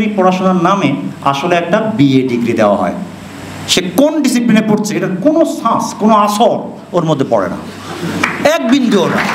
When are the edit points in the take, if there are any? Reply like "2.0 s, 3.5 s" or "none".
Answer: none